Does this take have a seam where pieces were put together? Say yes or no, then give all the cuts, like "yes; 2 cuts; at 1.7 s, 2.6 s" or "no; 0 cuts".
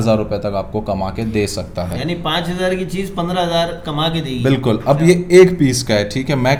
no; 0 cuts